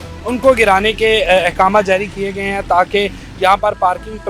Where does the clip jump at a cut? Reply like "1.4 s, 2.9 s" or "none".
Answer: none